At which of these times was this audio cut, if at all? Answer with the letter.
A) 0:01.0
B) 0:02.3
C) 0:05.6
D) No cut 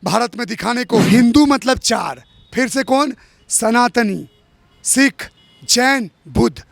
A